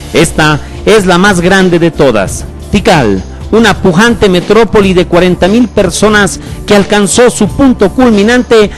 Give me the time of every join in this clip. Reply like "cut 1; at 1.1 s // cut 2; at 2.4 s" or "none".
cut 1; at 3.0 s